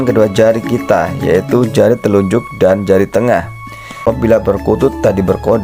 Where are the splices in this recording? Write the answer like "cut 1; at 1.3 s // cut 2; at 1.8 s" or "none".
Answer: cut 1; at 4.0 s

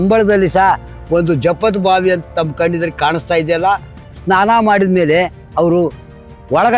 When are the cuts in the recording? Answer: cut 1; at 4.0 s

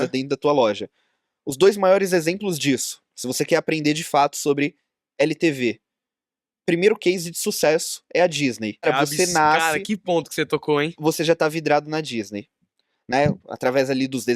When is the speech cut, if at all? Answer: cut 1; at 8.9 s

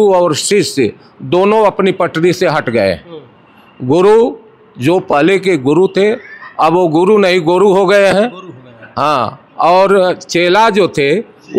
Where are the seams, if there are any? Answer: none

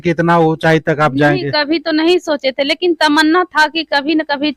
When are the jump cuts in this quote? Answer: none

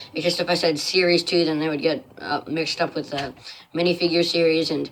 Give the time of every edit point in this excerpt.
none

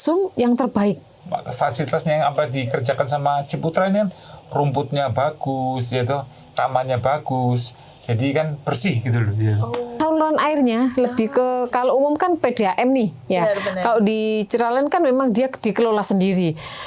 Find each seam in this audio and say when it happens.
cut 1; at 1.1 s // cut 2; at 10.0 s

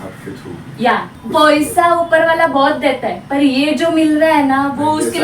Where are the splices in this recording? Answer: cut 1; at 1.1 s

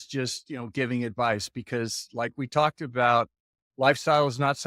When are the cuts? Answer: none

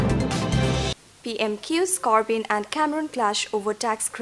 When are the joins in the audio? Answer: none

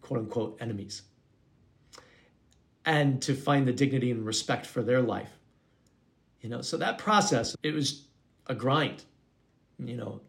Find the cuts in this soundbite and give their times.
cut 1; at 7.5 s

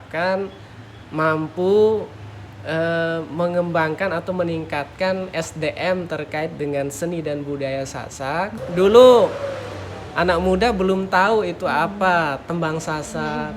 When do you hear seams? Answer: cut 1; at 8.6 s

